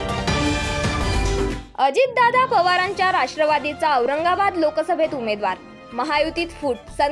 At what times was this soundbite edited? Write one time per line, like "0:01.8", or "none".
0:01.1